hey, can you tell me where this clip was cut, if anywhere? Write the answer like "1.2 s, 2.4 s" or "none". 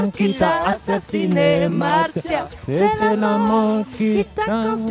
none

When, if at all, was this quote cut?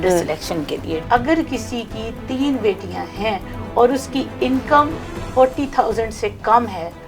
1.0 s

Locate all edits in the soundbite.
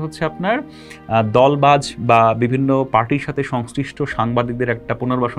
none

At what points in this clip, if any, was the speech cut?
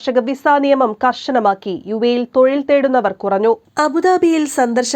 none

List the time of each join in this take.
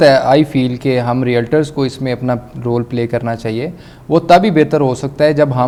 none

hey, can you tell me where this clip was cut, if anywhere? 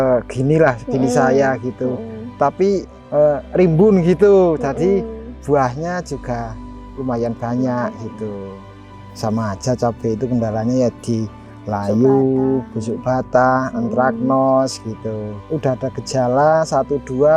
9.1 s, 15.5 s

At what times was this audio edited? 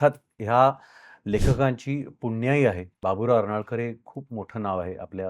2.9 s

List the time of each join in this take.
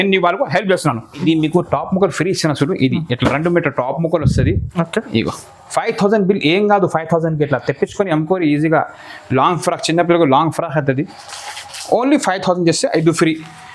1.1 s

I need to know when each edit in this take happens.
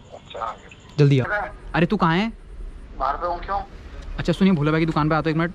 1.3 s

